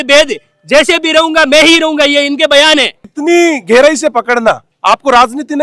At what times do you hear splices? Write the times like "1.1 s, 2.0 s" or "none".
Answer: 3.1 s